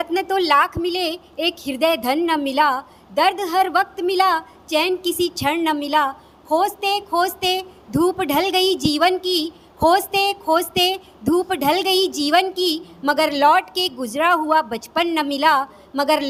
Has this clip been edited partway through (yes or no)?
no